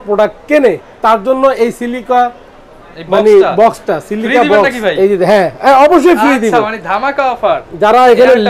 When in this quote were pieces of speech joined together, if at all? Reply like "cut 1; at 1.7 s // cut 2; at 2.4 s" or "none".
none